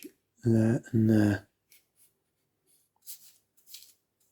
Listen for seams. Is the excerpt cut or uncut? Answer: cut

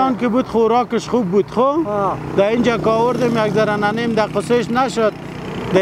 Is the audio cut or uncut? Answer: uncut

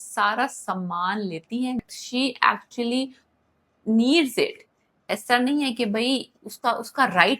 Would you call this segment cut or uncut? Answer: cut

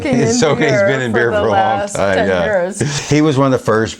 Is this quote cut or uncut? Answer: cut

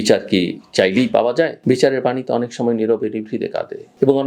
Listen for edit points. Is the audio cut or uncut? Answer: uncut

